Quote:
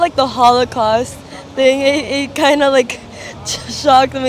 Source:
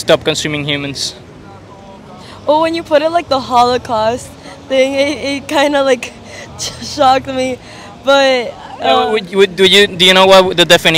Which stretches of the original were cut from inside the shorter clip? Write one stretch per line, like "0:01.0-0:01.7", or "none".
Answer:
none